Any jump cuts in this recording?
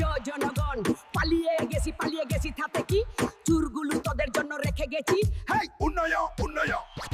no; 0 cuts

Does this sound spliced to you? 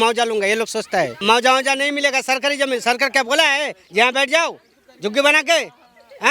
yes; 1 cut; at 1.2 s

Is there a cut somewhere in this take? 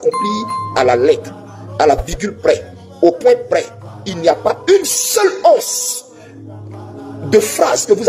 no; 0 cuts

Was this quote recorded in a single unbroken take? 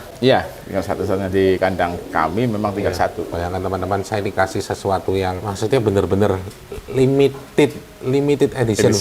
no; 2 cuts; at 3.3 s, 5.4 s

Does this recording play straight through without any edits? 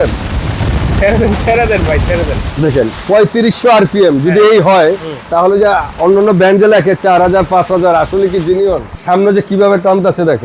no; 1 cut; at 8.9 s

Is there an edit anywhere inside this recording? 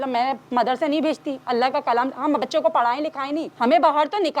yes; 2 cuts; at 1.3 s, 3.5 s

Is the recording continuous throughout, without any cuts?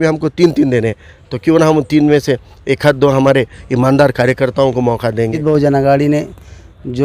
no; 1 cut; at 5.4 s

